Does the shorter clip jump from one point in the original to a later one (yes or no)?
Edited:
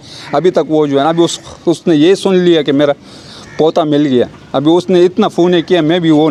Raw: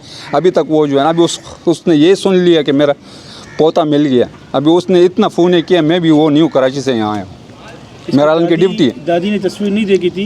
no